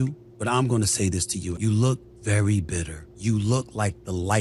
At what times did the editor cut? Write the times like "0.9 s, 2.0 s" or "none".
1.5 s